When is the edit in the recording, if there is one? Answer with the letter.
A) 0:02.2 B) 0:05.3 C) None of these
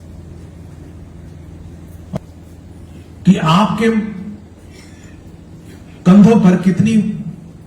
A